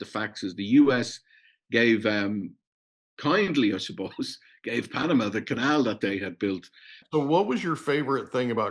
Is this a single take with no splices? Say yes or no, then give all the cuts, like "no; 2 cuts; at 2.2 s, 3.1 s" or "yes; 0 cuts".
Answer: no; 1 cut; at 7.0 s